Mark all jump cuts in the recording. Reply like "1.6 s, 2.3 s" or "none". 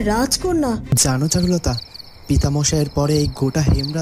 0.9 s